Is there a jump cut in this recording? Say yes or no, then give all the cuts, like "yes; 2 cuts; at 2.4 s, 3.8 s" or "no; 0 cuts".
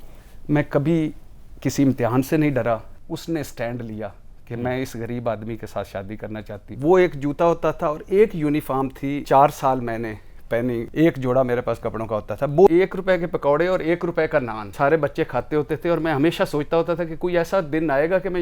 yes; 6 cuts; at 2.9 s, 6.7 s, 9.2 s, 10.9 s, 12.7 s, 14.6 s